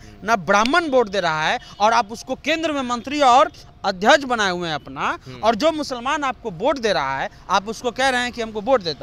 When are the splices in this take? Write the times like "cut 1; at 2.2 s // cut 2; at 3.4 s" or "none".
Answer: none

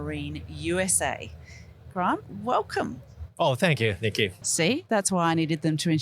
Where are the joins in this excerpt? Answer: cut 1; at 4.4 s

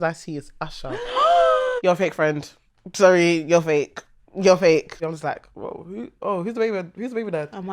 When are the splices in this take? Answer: cut 1; at 1.8 s // cut 2; at 5.0 s

